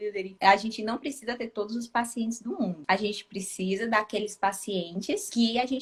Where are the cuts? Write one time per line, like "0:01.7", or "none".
none

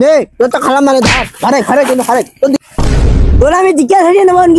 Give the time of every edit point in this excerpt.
none

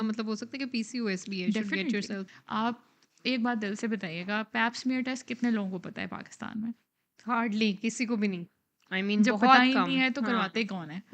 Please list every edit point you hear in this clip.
0:02.3

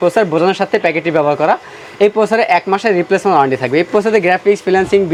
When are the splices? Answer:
none

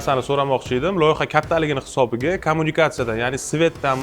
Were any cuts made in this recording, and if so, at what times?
none

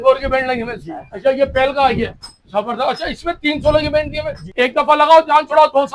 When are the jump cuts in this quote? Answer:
0:01.1
0:04.4

